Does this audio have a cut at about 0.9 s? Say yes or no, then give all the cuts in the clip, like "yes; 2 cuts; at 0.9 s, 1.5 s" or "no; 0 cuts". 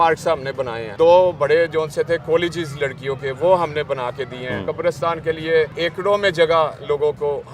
yes; 3 cuts; at 0.9 s, 4.7 s, 5.7 s